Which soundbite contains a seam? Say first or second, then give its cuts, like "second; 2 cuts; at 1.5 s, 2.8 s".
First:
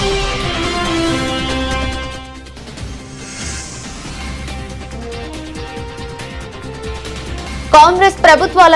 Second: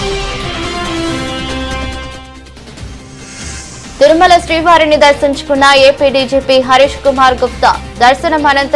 first; 1 cut; at 3.7 s